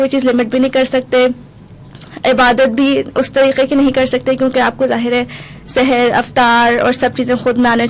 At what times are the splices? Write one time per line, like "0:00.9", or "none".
none